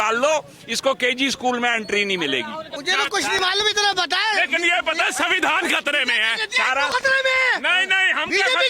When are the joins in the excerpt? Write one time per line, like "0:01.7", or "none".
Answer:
0:02.7